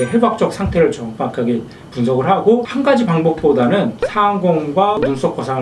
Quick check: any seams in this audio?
yes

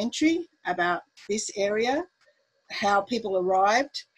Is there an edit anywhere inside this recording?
no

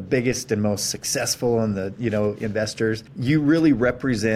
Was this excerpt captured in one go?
no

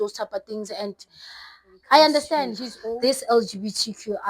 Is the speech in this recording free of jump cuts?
no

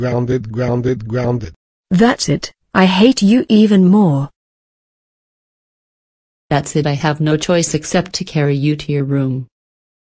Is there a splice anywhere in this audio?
yes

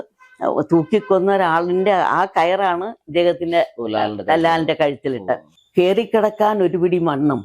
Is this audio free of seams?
no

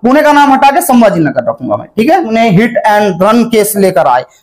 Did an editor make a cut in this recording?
yes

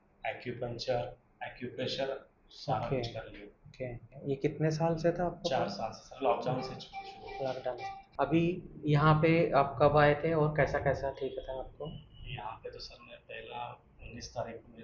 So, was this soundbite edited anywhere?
no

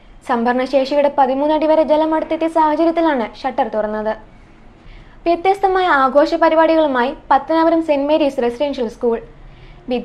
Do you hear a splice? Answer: yes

